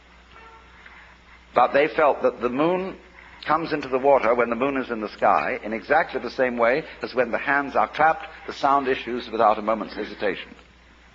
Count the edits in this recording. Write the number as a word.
one